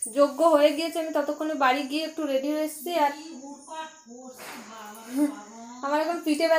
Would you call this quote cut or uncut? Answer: uncut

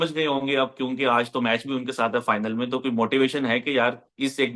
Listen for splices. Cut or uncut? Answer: uncut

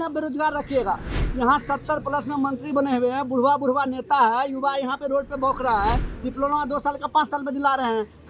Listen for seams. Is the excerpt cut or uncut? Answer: uncut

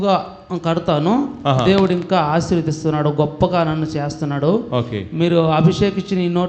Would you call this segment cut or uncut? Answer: uncut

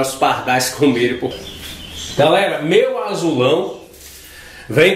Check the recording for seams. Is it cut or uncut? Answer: cut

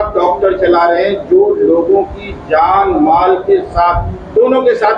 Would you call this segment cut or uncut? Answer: uncut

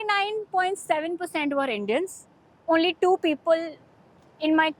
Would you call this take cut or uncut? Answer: uncut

